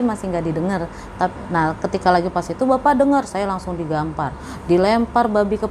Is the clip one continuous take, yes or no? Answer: yes